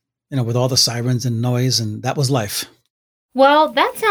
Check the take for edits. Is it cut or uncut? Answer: uncut